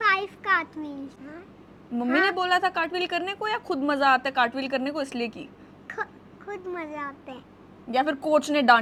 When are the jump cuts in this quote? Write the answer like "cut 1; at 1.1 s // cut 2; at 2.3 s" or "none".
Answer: none